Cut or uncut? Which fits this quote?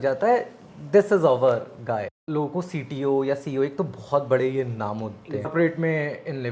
cut